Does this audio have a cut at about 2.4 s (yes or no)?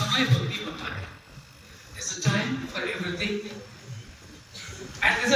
no